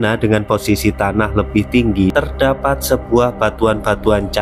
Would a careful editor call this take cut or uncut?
cut